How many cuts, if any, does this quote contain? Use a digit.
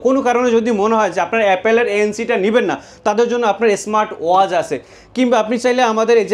0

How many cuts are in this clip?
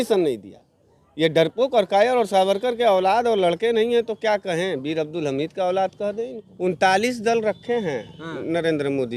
1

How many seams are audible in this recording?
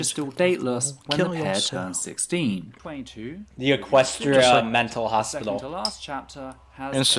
1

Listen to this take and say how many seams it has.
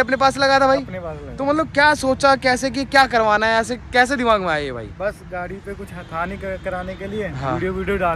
0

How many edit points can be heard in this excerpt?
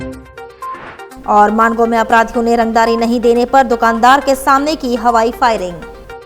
1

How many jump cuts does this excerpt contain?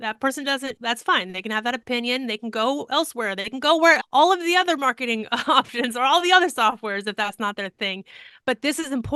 0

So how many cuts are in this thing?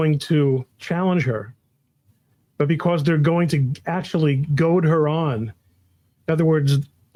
0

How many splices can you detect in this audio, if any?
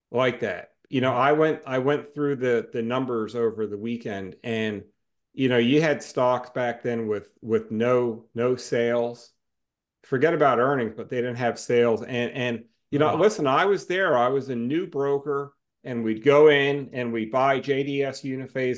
0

